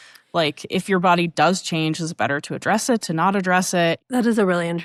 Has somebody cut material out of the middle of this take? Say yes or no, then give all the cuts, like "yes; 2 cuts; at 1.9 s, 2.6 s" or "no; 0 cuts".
no; 0 cuts